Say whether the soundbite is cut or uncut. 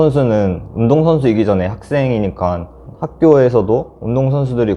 cut